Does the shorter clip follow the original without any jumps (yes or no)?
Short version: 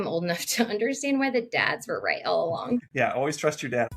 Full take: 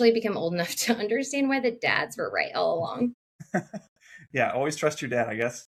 no